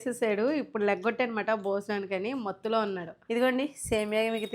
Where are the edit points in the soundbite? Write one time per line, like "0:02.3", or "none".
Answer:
0:03.1